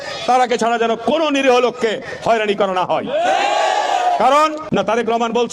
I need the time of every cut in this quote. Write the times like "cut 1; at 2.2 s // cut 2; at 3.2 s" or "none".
cut 1; at 4.6 s